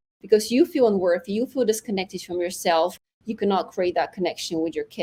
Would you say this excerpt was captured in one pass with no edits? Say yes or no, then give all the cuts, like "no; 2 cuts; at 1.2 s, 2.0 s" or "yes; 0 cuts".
yes; 0 cuts